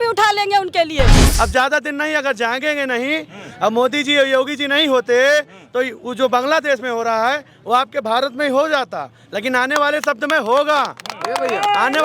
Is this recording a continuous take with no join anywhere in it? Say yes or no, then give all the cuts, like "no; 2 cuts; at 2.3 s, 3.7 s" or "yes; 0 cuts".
no; 1 cut; at 1.2 s